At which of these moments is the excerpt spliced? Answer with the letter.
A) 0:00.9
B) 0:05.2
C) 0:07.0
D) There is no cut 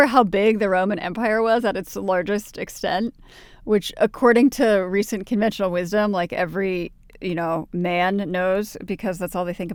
D